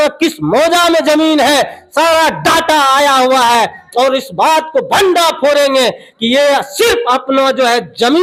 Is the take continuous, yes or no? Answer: yes